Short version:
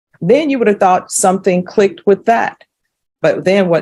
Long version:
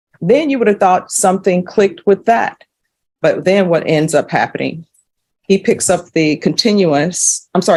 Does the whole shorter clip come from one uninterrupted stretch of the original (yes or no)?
yes